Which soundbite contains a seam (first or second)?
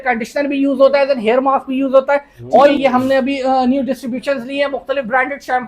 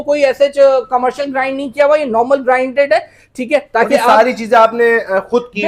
first